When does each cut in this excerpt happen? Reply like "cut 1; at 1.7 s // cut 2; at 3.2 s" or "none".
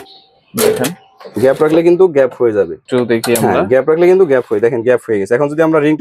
cut 1; at 2.8 s